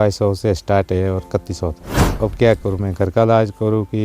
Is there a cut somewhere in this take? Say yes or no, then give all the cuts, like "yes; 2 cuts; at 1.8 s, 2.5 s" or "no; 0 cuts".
yes; 1 cut; at 2.1 s